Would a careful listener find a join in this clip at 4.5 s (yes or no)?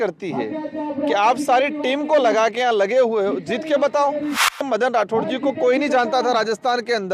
yes